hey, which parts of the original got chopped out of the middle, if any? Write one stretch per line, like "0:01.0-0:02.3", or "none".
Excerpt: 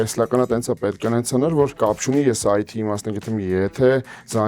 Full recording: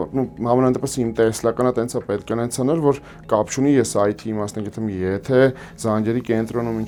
0:03.0-0:03.2